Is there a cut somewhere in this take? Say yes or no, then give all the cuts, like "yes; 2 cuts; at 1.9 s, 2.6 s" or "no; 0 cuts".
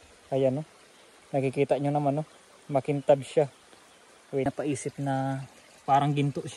yes; 1 cut; at 4.5 s